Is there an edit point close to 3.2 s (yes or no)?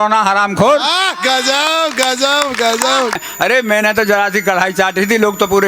yes